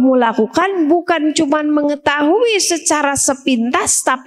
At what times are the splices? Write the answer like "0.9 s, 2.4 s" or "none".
none